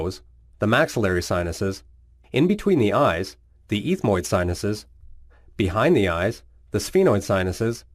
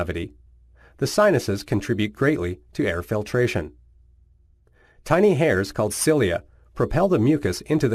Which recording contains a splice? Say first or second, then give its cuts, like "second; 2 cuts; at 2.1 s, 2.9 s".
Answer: first; 1 cut; at 2.6 s